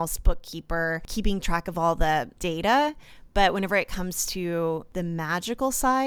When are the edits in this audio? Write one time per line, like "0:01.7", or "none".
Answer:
0:01.0
0:02.3
0:04.9